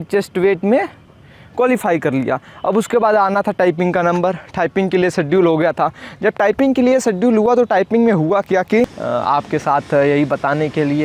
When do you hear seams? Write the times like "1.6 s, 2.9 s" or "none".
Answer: 9.0 s